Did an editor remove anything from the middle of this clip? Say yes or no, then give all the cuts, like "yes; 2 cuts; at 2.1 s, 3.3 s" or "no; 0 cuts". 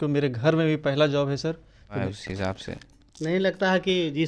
yes; 1 cut; at 2.0 s